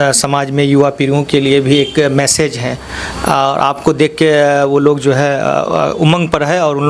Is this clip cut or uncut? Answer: uncut